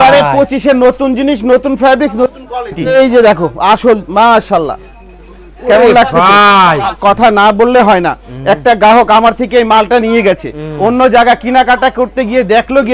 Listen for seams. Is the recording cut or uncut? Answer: cut